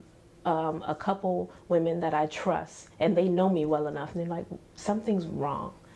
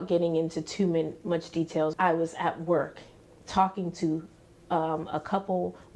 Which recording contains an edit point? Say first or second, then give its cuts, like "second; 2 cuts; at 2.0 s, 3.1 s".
second; 1 cut; at 1.9 s